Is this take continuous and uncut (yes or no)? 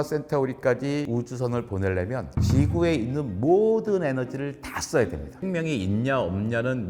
no